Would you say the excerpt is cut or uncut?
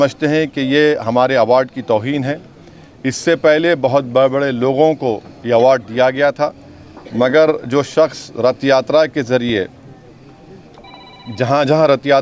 uncut